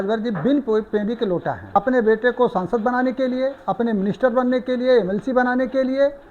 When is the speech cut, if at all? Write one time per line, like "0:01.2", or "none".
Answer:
0:01.6